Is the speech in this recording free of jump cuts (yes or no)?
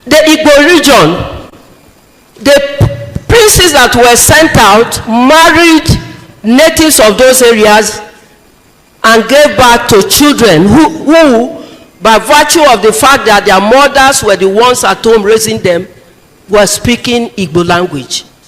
yes